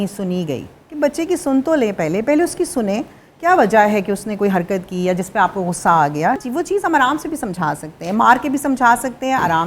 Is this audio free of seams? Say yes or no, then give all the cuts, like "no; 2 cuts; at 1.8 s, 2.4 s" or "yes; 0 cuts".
no; 1 cut; at 6.4 s